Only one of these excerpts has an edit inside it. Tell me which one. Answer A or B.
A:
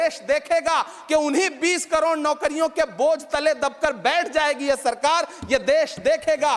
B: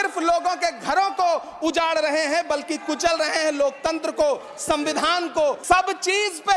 B